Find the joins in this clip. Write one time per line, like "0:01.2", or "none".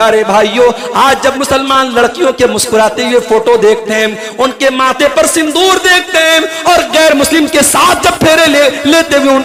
none